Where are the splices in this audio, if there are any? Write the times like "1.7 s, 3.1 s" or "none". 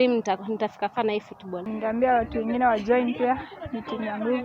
1.7 s